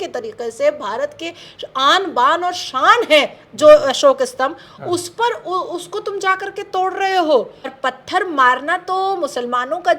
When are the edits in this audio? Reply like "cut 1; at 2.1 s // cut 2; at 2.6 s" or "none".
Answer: cut 1; at 7.7 s